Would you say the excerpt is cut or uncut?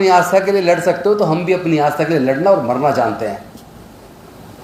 uncut